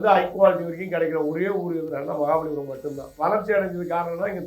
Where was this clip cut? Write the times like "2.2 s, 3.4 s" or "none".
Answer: 3.1 s